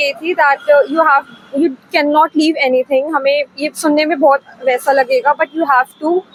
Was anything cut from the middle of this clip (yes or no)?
no